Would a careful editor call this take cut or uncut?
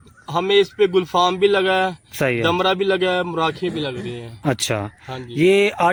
uncut